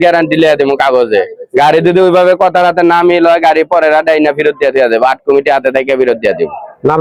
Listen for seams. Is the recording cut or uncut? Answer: uncut